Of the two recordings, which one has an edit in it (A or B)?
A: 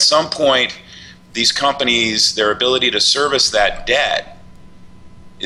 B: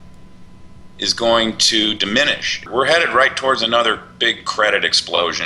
B